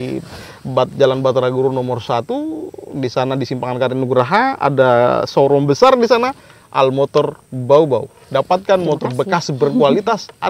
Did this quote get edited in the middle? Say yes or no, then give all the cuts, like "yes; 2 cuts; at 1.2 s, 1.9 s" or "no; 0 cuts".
no; 0 cuts